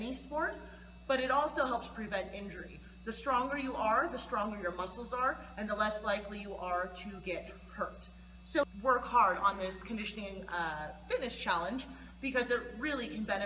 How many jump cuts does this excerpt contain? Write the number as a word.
one